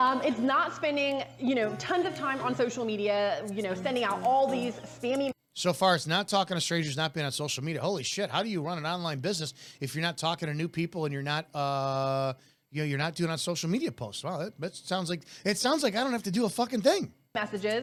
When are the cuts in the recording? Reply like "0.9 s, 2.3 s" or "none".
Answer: none